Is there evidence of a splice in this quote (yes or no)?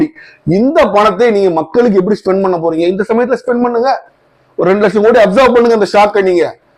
no